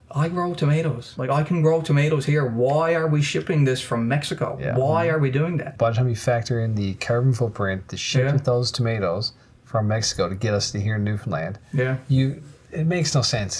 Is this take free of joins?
no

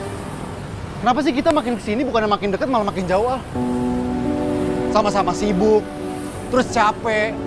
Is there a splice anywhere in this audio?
no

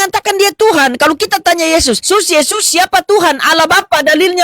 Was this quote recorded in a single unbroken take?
no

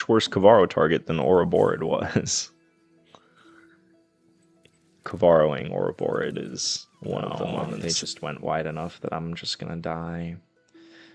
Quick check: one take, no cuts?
no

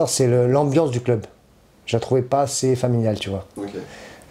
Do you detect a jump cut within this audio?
no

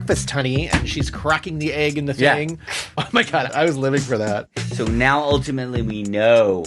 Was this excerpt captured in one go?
no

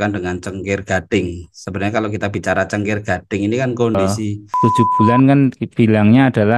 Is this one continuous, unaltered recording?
no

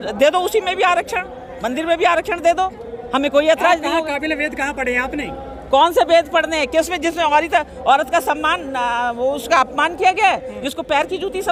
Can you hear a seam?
no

